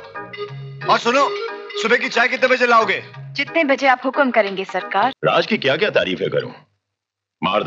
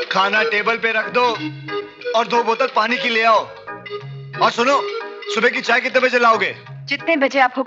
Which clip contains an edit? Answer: first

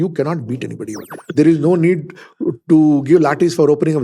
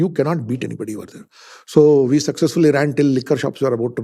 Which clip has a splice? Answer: first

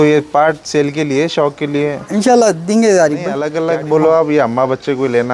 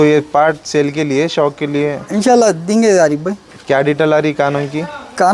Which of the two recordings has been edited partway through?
first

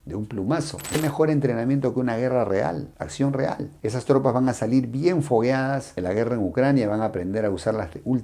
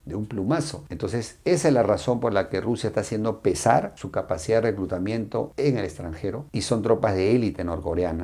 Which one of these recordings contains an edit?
first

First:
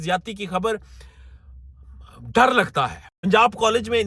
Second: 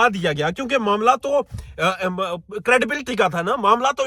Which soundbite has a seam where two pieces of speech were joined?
first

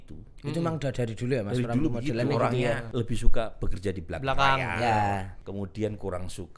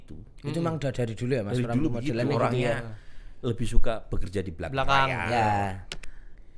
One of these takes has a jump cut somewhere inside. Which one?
first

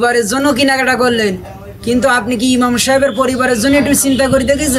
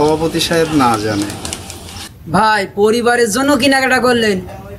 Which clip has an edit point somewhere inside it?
second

